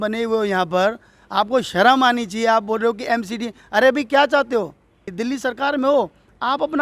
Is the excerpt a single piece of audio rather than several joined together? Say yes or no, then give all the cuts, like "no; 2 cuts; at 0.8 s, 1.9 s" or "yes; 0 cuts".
no; 1 cut; at 5.1 s